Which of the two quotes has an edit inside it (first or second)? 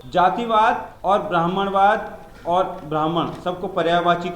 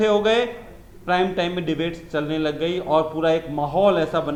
first